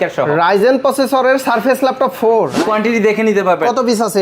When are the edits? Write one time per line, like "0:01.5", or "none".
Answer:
0:02.6